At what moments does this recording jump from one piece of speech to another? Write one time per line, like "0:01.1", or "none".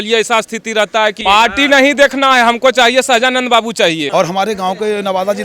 0:01.2
0:04.1